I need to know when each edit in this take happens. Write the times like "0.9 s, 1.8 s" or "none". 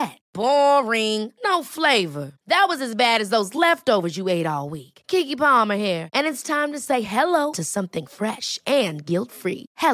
none